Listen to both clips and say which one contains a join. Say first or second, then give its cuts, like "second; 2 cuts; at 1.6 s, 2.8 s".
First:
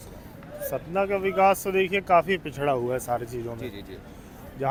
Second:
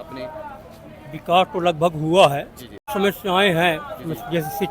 second; 1 cut; at 2.9 s